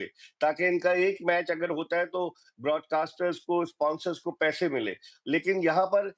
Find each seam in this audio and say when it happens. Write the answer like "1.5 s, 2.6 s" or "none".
none

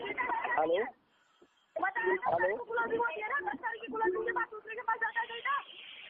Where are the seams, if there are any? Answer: none

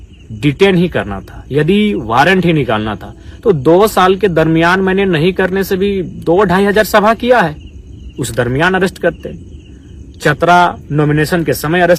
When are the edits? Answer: none

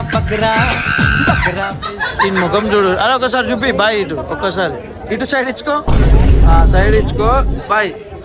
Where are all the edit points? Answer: 2.2 s

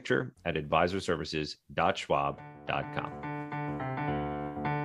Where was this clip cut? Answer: 3.1 s

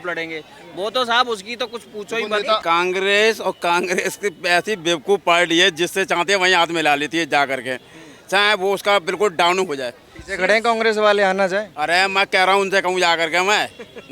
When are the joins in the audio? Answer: 2.6 s

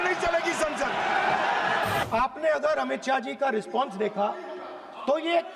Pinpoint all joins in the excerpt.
2.0 s

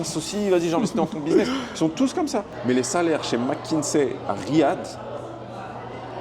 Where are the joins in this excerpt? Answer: 2.5 s

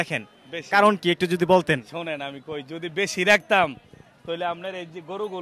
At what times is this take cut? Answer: none

